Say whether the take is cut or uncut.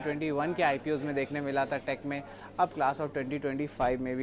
cut